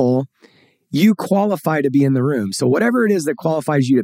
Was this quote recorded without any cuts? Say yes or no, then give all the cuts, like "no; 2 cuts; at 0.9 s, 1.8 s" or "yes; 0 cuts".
yes; 0 cuts